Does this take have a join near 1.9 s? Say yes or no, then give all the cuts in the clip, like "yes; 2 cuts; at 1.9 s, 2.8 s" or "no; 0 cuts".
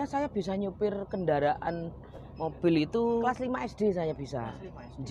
no; 1 cut; at 3.2 s